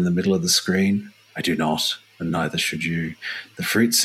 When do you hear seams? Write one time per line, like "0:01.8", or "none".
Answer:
none